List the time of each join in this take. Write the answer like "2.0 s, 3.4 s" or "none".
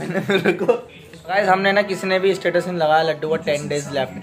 1.3 s

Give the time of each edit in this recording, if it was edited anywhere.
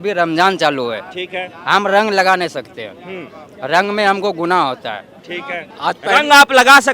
5.6 s

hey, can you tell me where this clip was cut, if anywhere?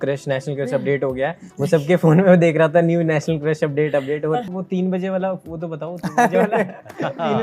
4.6 s

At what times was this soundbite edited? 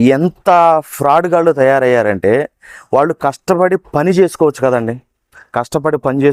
none

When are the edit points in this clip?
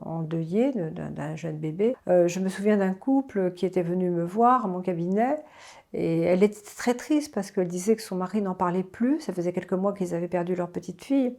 2.0 s

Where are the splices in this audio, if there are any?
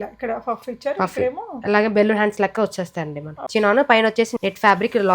3.3 s, 4.3 s

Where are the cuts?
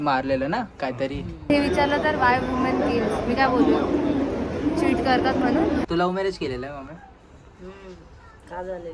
1.5 s, 5.8 s

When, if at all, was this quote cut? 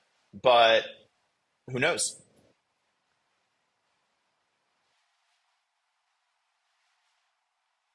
none

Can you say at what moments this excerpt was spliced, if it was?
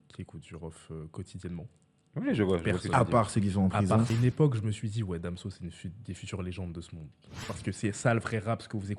4.1 s, 7.4 s

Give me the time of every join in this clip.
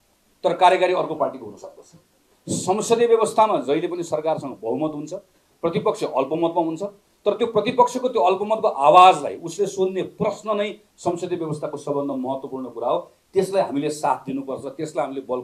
2.3 s

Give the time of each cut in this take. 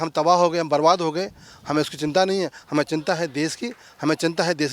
none

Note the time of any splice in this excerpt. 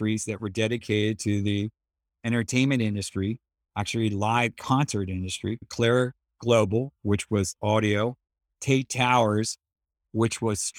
none

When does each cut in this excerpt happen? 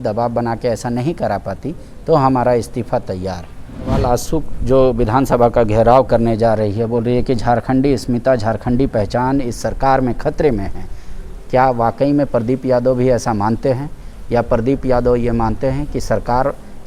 4.0 s

